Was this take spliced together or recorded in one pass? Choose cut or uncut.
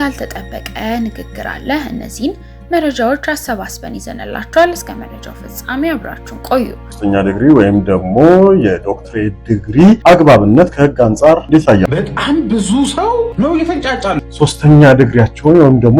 cut